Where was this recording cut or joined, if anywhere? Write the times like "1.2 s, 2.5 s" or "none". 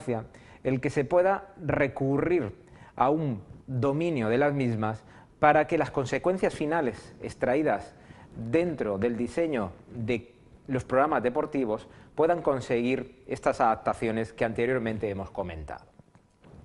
none